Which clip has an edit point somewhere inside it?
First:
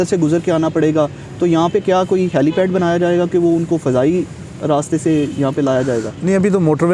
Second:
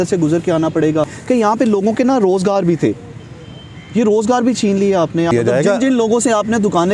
second; 2 cuts; at 1.3 s, 5.4 s

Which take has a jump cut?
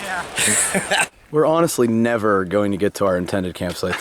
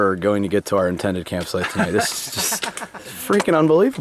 first; 1 cut; at 1.2 s

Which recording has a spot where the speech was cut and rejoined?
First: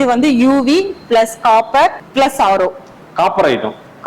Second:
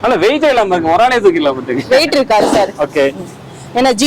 first; 1 cut; at 2.0 s

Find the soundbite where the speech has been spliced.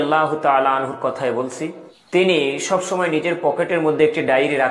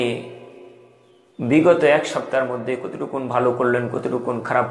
first; 1 cut; at 1.9 s

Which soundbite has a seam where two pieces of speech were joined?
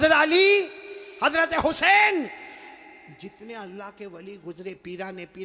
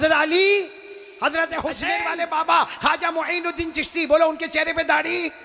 second; 1 cut; at 2.0 s

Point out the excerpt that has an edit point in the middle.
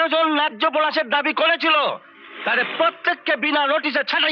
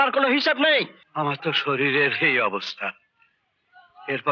second; 1 cut; at 1.0 s

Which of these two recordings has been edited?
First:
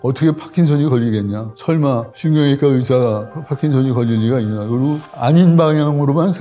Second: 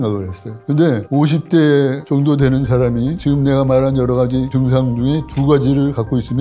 second; 2 cuts; at 0.9 s, 4.5 s

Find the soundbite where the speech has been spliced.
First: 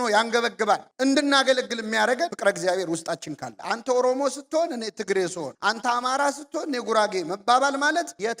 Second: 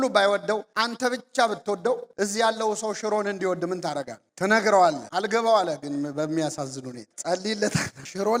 first; 1 cut; at 3.6 s

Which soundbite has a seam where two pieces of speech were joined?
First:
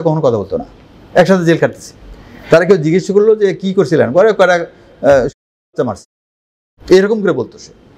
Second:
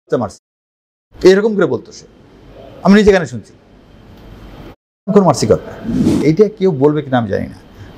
second; 1 cut; at 6.1 s

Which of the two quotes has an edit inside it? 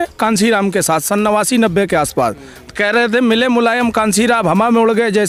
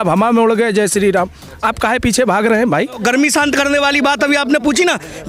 second; 1 cut; at 3.0 s

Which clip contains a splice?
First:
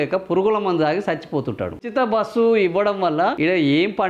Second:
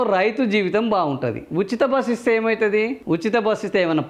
first; 2 cuts; at 1.9 s, 3.4 s

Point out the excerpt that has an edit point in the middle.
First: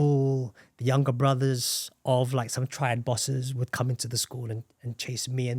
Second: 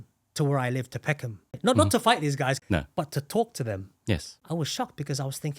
second; 3 cuts; at 1.5 s, 2.6 s, 4.3 s

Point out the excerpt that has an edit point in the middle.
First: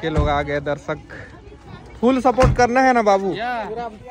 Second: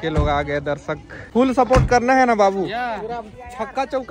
second; 1 cut; at 1.1 s

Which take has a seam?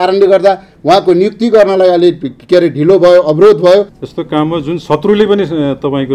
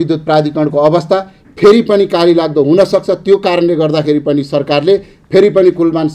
first; 1 cut; at 4.0 s

